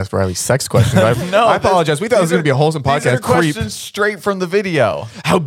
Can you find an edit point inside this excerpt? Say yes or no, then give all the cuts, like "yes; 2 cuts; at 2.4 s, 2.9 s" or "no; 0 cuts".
yes; 1 cut; at 3.2 s